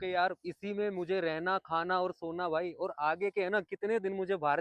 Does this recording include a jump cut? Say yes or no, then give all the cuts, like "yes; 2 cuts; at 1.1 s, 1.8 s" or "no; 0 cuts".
no; 0 cuts